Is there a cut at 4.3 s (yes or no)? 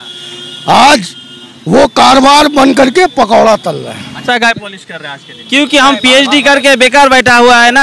yes